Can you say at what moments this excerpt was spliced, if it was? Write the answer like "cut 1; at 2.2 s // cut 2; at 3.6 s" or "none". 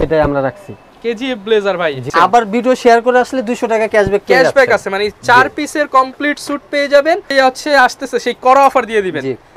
cut 1; at 2.0 s // cut 2; at 7.3 s

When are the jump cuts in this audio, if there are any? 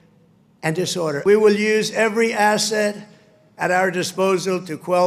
cut 1; at 1.2 s

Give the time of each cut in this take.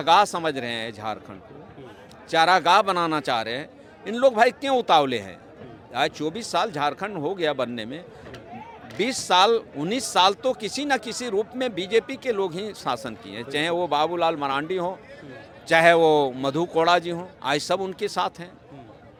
none

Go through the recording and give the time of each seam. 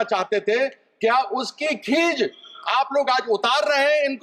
none

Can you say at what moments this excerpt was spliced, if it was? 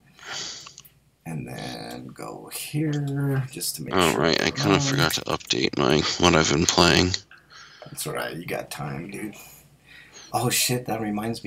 cut 1; at 0.9 s

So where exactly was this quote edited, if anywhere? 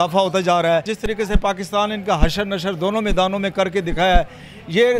cut 1; at 0.9 s

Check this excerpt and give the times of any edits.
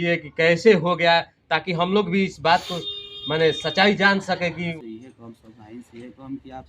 cut 1; at 4.7 s

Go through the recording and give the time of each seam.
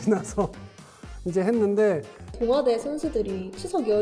cut 1; at 2.3 s

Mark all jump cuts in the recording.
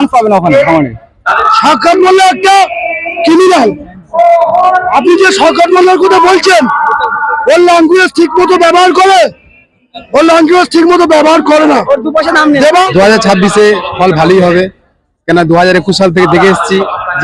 cut 1; at 1.3 s // cut 2; at 12.7 s

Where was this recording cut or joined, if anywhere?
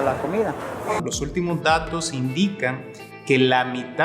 cut 1; at 1.0 s

